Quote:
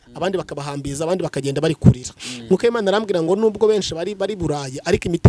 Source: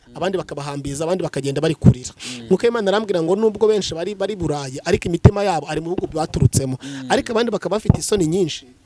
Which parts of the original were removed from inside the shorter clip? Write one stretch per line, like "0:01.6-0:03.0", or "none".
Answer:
none